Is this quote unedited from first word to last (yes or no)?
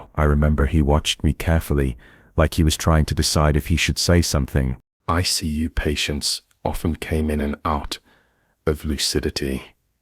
no